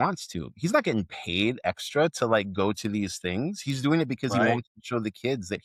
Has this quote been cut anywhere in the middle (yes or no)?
no